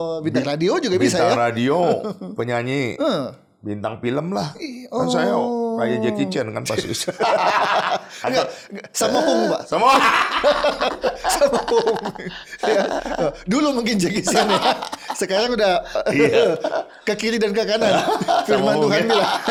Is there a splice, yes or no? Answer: no